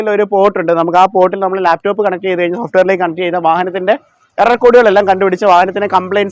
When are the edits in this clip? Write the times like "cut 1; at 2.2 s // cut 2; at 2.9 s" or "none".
none